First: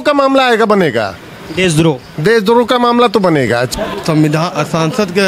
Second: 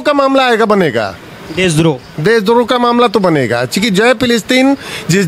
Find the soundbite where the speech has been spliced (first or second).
first